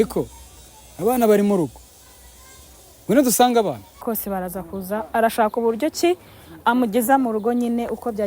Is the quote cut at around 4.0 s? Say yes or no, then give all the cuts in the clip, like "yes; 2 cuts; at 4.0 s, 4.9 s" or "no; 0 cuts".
yes; 1 cut; at 4.0 s